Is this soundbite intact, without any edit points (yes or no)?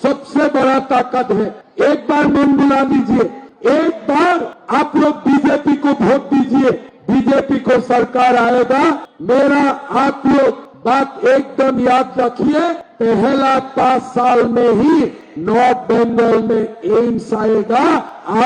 yes